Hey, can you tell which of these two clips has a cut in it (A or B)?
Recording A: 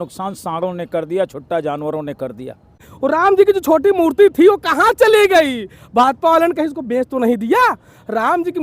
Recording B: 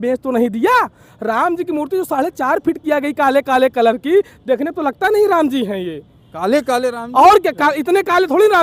A